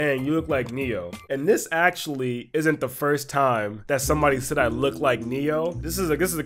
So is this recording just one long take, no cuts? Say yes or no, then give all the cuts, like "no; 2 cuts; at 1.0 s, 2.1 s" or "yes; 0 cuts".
no; 1 cut; at 1.3 s